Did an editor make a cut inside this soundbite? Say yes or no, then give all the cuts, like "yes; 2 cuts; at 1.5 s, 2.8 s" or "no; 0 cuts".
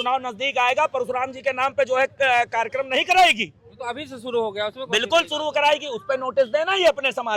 no; 0 cuts